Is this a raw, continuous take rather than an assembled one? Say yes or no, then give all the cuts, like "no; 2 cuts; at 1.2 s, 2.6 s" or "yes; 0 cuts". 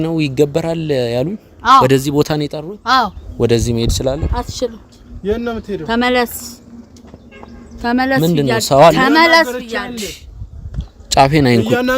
no; 1 cut; at 3.2 s